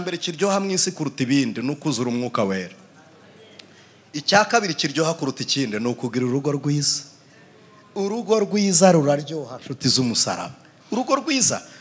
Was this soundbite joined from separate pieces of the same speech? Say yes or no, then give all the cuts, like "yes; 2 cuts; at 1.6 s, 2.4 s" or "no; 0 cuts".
no; 0 cuts